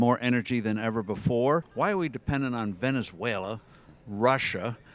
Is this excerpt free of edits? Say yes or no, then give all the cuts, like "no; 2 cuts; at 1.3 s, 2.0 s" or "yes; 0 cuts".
no; 1 cut; at 1.7 s